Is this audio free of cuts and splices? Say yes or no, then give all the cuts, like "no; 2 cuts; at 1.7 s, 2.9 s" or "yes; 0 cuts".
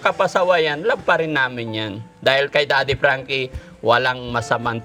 yes; 0 cuts